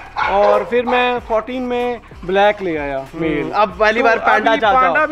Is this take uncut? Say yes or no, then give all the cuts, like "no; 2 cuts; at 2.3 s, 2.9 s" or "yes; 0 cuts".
yes; 0 cuts